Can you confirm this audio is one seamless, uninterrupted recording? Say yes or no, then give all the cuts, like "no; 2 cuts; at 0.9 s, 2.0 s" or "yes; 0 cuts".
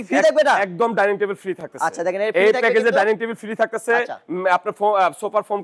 yes; 0 cuts